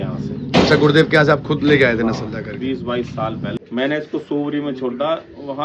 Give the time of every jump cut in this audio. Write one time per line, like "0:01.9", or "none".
0:03.6